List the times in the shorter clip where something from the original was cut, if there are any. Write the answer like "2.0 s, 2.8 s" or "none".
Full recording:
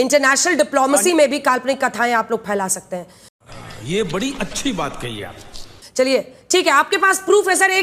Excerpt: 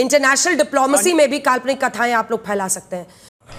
none